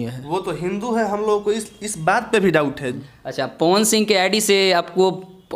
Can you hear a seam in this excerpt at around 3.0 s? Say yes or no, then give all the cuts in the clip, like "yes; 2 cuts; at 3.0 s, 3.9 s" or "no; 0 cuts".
yes; 1 cut; at 3.0 s